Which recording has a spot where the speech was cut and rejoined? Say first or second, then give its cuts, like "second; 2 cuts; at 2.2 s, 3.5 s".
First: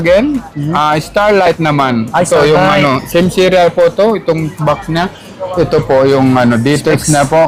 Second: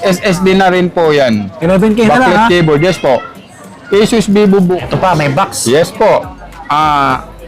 second; 1 cut; at 4.8 s